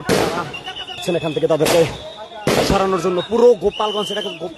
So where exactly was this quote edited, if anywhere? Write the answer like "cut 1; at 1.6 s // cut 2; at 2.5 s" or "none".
cut 1; at 1.0 s